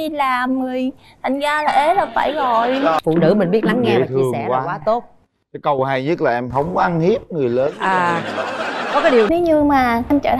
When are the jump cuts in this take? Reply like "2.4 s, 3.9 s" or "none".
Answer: 3.0 s, 9.3 s